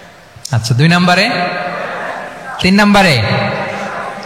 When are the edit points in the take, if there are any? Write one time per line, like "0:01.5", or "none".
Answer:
0:02.6